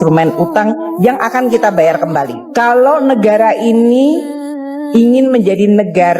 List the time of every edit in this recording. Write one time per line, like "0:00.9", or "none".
0:02.4